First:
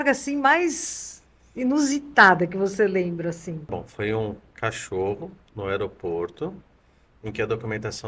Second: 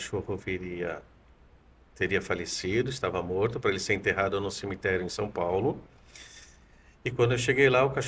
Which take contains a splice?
first; 1 cut; at 3.8 s

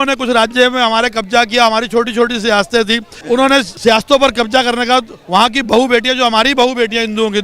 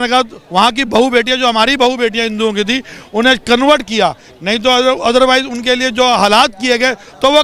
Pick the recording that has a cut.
first; 2 cuts; at 3.1 s, 3.7 s

